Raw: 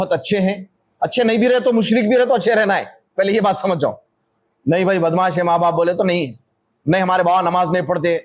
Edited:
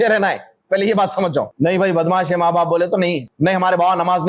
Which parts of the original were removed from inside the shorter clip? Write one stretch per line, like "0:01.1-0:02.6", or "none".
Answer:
0:04.0-0:04.6
0:06.3-0:06.7